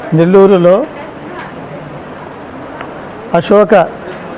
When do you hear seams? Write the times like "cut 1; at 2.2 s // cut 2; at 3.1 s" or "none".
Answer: cut 1; at 0.9 s